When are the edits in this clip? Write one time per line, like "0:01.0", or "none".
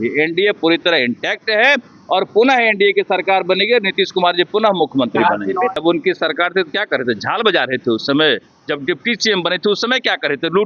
0:05.8